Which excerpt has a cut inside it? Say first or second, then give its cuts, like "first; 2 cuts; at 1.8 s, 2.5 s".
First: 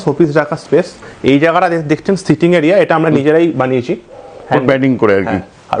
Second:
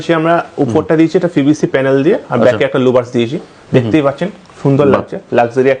first; 1 cut; at 1.1 s